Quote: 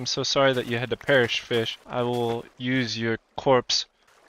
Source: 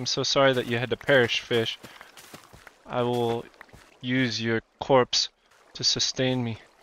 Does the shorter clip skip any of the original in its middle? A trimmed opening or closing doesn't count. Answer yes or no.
yes